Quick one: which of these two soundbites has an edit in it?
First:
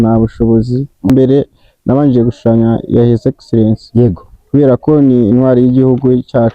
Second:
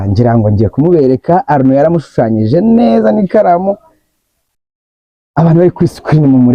first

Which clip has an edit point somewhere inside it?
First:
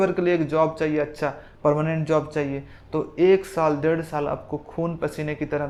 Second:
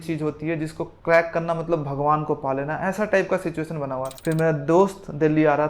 second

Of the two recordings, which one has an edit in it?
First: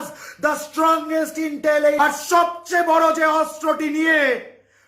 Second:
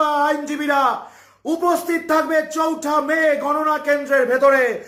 first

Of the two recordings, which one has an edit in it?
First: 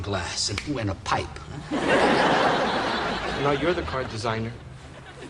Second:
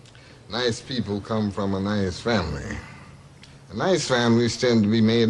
second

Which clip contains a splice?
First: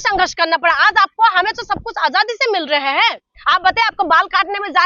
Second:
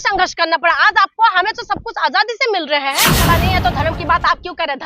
second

